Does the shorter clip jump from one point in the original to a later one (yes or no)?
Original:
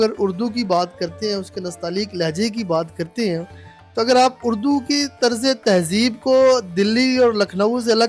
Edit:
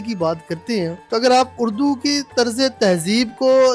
yes